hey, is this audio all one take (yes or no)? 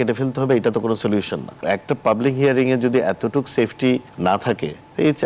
no